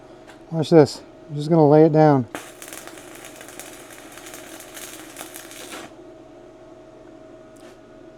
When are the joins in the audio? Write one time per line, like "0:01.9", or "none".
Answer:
none